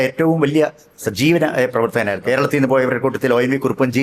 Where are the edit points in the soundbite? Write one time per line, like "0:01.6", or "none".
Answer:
0:02.1